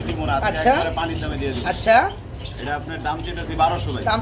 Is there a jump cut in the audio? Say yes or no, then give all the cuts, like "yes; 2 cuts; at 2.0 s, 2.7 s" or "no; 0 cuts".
no; 0 cuts